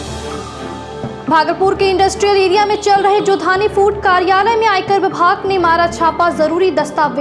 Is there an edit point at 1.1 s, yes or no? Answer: yes